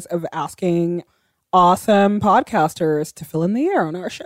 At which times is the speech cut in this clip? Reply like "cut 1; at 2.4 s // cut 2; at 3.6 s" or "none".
cut 1; at 1.0 s // cut 2; at 3.1 s